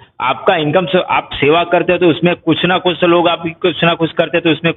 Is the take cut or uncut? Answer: uncut